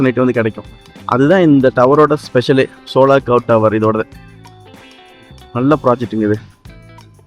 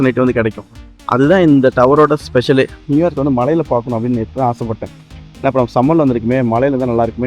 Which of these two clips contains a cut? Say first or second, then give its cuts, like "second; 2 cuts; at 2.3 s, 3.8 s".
second; 1 cut; at 2.8 s